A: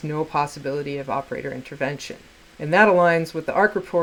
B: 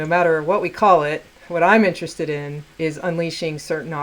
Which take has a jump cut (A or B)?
B